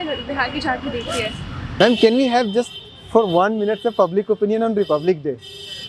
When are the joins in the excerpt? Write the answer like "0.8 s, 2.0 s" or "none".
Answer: 1.8 s